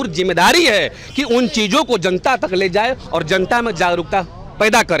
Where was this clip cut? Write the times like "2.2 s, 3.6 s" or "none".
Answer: none